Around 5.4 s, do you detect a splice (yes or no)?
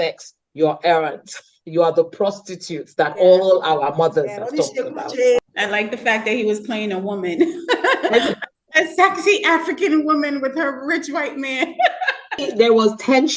yes